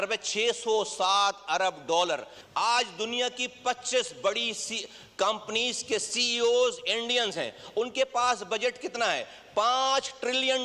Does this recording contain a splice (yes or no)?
yes